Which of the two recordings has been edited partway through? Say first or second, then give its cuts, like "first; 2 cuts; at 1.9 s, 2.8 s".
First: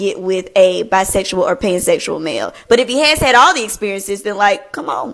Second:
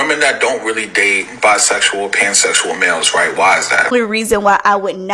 second; 1 cut; at 3.9 s